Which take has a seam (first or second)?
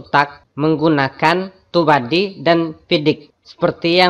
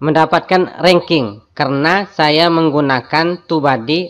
second